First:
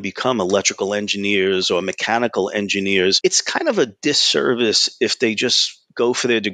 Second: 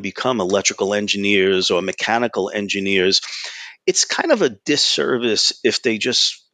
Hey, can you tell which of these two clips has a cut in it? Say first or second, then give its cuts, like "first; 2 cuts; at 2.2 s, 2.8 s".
first; 1 cut; at 3.2 s